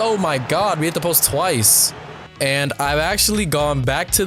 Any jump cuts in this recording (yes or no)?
yes